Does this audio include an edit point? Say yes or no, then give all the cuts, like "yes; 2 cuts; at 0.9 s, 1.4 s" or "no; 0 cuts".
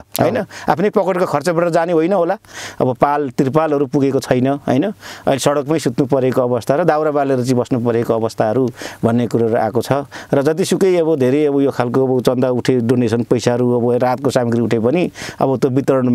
yes; 1 cut; at 2.5 s